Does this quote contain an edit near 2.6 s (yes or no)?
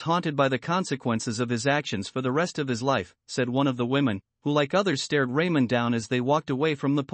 yes